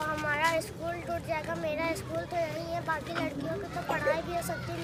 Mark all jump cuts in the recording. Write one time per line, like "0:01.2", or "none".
none